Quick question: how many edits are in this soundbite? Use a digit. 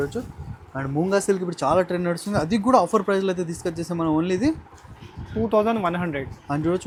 0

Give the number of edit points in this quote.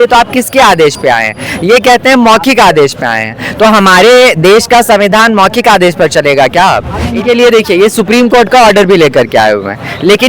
1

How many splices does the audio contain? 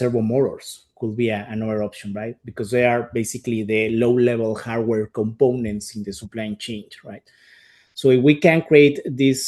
0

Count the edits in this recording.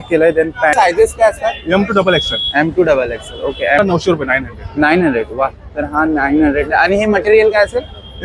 2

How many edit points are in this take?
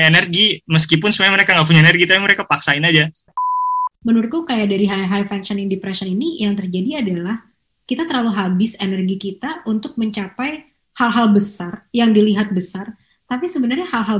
1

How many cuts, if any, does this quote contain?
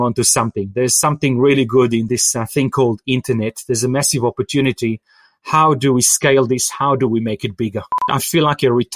2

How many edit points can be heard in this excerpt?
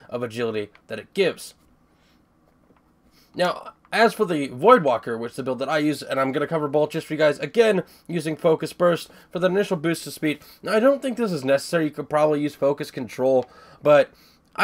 1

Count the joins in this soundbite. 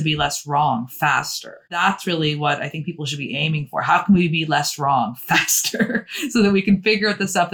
1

